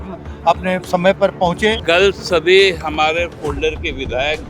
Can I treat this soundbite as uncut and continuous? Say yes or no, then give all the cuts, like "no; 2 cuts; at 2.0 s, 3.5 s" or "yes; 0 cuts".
no; 1 cut; at 1.8 s